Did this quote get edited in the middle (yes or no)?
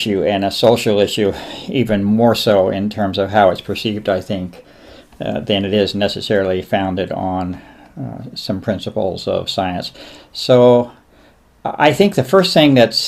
yes